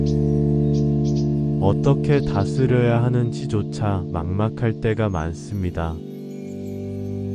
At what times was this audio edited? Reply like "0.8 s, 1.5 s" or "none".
none